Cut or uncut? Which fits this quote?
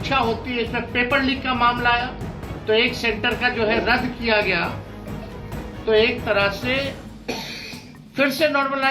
uncut